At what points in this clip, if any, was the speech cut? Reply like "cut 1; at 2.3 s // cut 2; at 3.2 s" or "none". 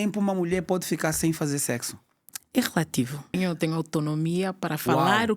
cut 1; at 3.4 s